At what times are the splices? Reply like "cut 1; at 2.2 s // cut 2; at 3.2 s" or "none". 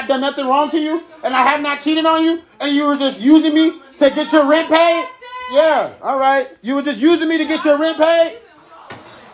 none